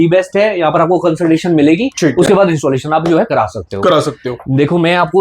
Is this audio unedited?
yes; 0 cuts

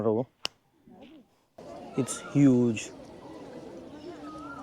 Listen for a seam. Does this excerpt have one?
yes; 1 cut; at 1.6 s

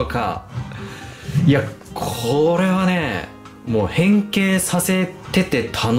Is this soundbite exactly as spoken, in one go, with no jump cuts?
yes; 0 cuts

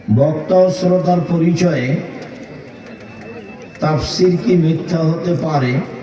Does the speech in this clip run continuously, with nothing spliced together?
yes; 0 cuts

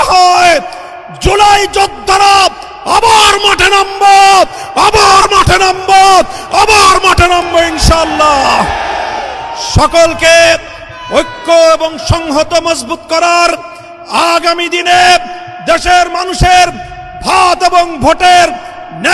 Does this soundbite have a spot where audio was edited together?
no; 0 cuts

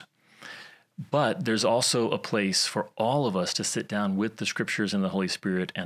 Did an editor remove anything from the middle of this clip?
no; 0 cuts

